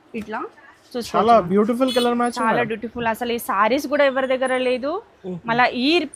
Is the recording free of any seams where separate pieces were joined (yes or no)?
yes